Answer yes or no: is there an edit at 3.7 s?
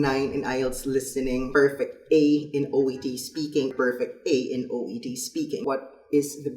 yes